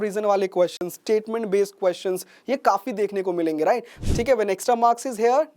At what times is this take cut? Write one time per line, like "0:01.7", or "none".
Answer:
0:03.9